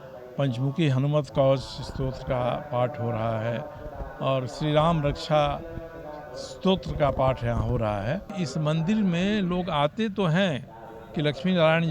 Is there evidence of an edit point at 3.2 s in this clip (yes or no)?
no